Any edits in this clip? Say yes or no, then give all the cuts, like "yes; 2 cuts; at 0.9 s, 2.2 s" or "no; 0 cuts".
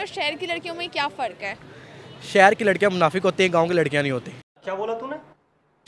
no; 0 cuts